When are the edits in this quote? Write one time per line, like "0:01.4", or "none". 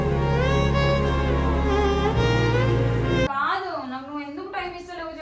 0:03.3